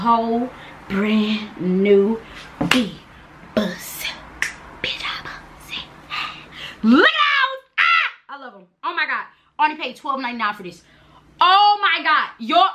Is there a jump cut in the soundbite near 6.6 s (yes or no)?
no